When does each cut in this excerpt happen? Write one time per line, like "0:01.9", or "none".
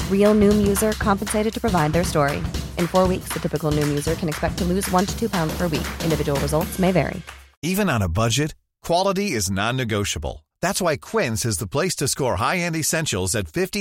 0:07.6

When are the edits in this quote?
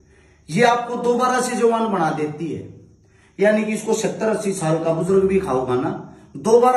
none

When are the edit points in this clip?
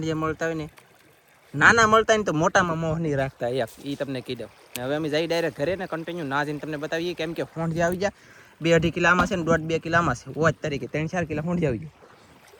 none

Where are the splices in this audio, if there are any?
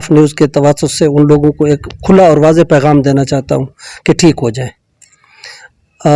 none

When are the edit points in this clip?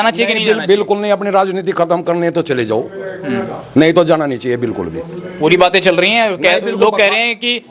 none

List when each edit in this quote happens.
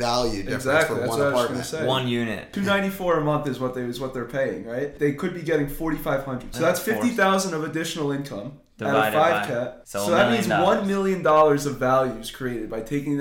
0:02.5
0:04.9
0:06.5
0:09.8

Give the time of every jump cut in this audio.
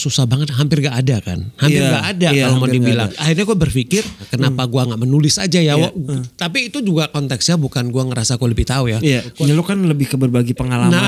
0:03.1
0:04.3
0:09.3

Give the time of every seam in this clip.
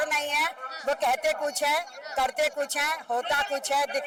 none

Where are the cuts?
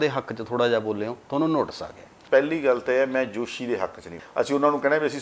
0:02.1
0:04.2

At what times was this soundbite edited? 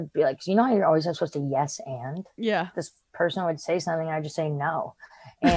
0:02.6

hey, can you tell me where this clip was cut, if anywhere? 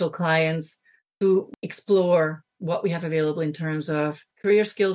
0:01.5

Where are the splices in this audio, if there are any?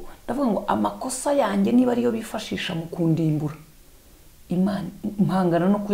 none

